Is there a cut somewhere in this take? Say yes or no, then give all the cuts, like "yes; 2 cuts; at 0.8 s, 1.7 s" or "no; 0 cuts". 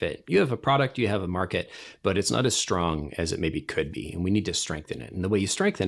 no; 0 cuts